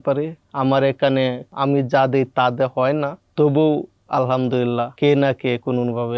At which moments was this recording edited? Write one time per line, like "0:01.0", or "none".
0:01.5
0:03.2
0:04.9